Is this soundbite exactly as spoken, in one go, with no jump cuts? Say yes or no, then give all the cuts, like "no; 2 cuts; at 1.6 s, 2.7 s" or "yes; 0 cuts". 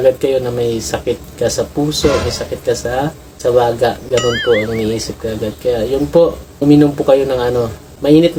yes; 0 cuts